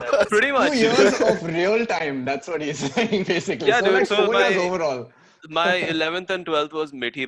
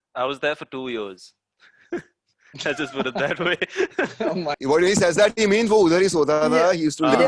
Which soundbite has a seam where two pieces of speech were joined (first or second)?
second